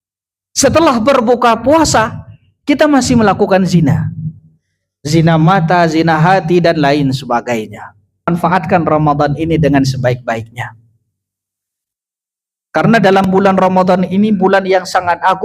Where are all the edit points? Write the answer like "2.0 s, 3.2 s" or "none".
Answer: 8.3 s

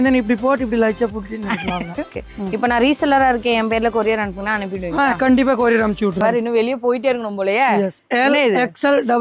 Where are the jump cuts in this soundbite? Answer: 2.2 s, 6.2 s

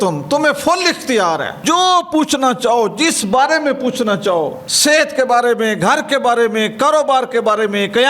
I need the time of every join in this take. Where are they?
none

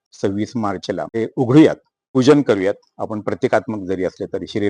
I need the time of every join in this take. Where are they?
1.1 s, 1.9 s

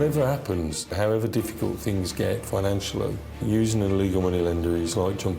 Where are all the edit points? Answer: 0.9 s, 3.4 s

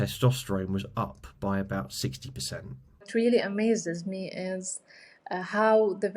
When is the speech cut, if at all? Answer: 3.1 s

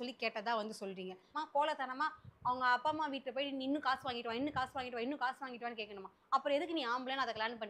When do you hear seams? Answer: 1.4 s

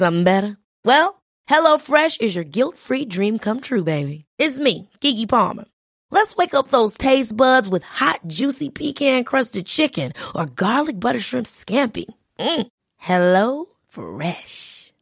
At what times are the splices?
none

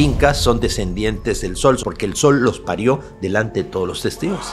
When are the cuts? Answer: 1.8 s

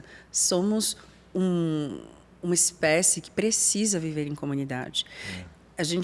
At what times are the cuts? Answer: none

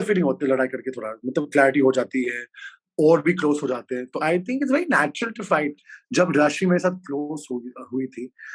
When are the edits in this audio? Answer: 5.9 s

